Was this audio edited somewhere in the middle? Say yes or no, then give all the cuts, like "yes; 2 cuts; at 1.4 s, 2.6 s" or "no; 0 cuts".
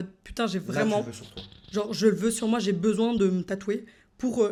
no; 0 cuts